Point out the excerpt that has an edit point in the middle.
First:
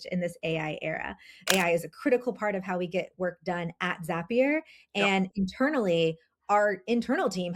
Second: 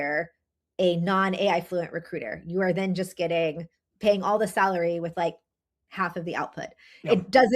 first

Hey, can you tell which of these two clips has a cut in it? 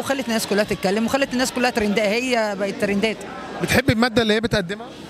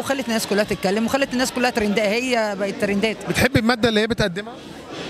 second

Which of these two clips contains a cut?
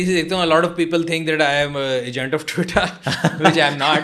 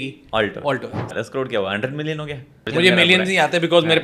second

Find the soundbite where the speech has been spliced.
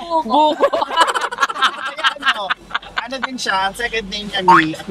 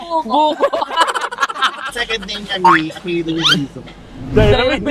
second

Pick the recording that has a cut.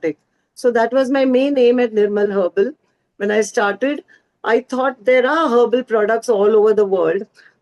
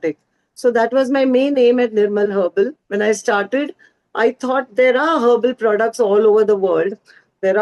second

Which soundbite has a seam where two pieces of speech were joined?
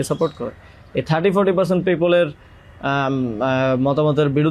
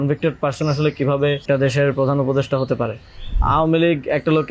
second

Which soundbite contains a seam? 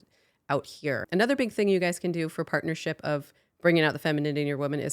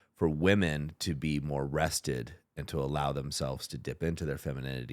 first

